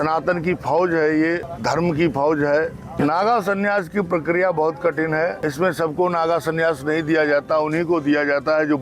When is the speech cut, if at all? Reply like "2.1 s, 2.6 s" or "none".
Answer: 1.5 s, 2.8 s, 5.4 s